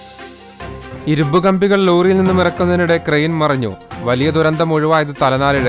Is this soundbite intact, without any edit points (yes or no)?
no